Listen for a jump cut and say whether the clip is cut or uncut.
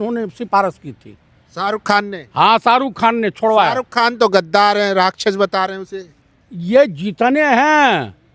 uncut